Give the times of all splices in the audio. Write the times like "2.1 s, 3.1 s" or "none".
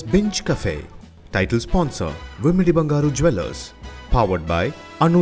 none